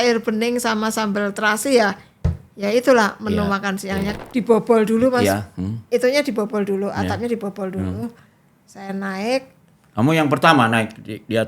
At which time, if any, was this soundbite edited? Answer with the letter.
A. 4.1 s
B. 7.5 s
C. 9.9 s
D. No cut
A